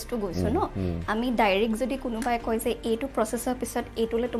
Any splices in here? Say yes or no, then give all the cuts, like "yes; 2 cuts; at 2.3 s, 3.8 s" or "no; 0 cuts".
no; 0 cuts